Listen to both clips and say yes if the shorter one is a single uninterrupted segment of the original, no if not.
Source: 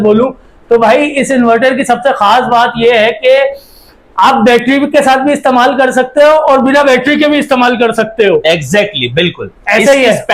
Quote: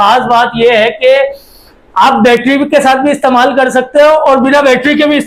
yes